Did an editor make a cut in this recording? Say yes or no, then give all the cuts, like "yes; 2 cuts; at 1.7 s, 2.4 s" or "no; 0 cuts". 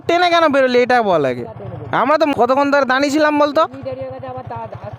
yes; 1 cut; at 2.3 s